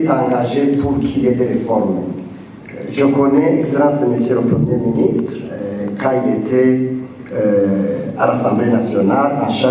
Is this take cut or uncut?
uncut